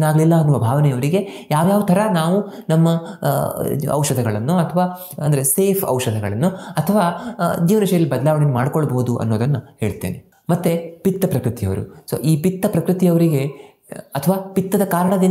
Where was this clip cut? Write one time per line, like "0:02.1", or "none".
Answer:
0:10.2